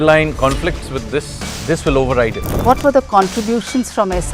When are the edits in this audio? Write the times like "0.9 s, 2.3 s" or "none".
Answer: 1.5 s, 2.5 s